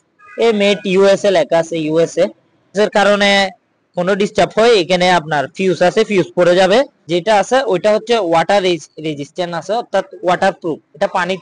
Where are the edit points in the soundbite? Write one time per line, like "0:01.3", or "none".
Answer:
0:02.7
0:07.0